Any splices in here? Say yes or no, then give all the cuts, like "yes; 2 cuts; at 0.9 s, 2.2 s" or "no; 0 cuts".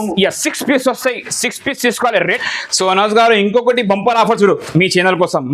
yes; 1 cut; at 2.4 s